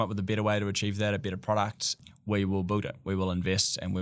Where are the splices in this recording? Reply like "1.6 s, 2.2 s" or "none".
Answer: 2.0 s